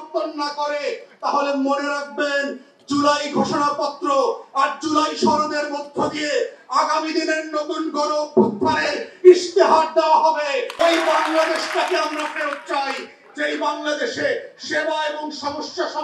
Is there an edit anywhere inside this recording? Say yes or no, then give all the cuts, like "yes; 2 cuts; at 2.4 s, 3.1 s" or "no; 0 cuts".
yes; 1 cut; at 10.7 s